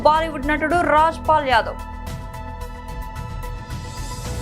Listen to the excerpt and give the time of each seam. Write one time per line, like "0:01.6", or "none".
0:01.8